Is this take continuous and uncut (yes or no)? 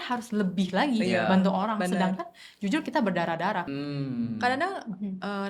no